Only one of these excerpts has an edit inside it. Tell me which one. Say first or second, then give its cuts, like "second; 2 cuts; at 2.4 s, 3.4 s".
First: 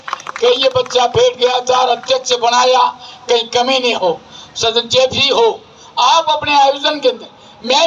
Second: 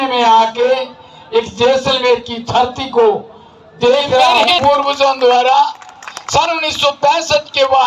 second; 1 cut; at 4.5 s